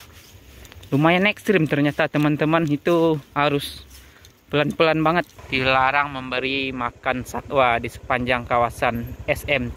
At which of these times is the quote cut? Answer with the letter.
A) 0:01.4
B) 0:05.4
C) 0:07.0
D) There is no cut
B